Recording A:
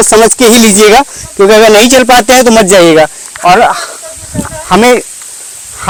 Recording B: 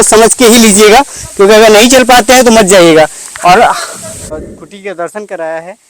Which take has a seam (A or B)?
B